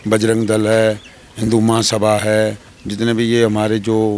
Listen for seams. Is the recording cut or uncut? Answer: uncut